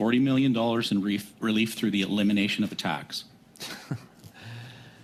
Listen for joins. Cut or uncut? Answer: uncut